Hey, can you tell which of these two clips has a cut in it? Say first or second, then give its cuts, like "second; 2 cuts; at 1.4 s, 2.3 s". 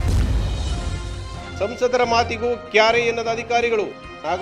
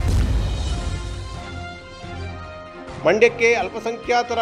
first; 1 cut; at 1.5 s